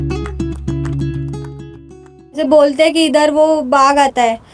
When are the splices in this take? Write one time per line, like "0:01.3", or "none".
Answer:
0:02.2